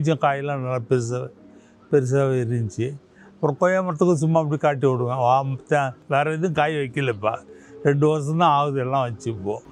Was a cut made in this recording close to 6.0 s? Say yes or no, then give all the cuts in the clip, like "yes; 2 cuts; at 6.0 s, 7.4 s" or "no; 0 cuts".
yes; 1 cut; at 6.0 s